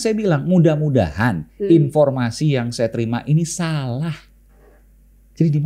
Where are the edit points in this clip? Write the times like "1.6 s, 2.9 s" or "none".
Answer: none